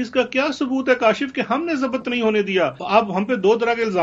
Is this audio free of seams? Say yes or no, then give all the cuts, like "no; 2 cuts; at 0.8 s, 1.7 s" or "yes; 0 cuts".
no; 1 cut; at 2.8 s